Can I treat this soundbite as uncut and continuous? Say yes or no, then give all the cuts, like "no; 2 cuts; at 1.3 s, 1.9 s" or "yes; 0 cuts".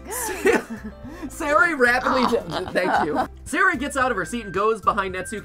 no; 1 cut; at 3.3 s